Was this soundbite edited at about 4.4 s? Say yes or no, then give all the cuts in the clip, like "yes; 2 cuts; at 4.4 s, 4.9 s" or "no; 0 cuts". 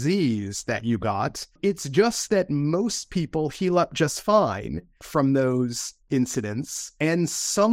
no; 3 cuts; at 1.6 s, 6.0 s, 6.8 s